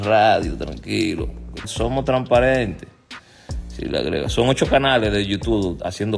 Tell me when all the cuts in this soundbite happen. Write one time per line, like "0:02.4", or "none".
0:01.7